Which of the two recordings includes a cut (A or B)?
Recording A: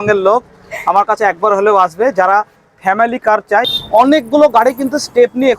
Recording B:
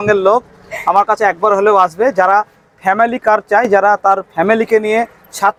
A